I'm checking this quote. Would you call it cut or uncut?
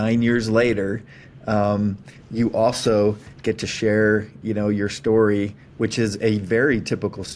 uncut